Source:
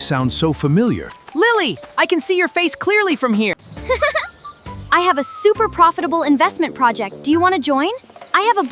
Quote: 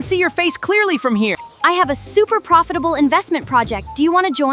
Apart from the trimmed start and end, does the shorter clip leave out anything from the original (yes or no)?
yes